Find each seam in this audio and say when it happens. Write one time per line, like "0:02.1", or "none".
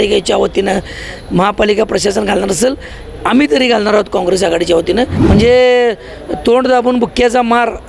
0:05.2